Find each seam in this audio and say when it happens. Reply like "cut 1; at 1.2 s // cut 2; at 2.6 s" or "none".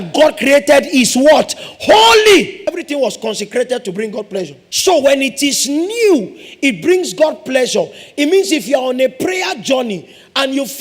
cut 1; at 2.6 s // cut 2; at 4.6 s